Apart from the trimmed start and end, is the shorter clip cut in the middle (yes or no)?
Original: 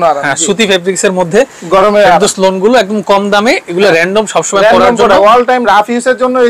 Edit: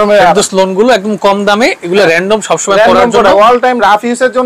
no